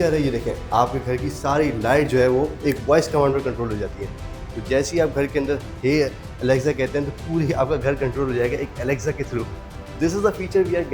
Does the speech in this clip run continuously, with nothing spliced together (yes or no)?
yes